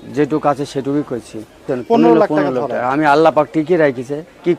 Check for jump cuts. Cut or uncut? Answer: cut